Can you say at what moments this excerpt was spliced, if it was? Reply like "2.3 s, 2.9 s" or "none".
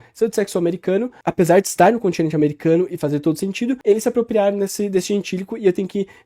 3.8 s